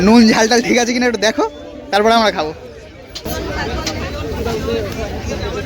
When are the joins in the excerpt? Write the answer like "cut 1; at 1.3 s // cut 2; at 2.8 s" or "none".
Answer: cut 1; at 3.2 s